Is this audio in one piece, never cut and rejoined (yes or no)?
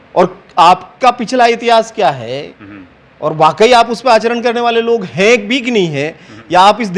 yes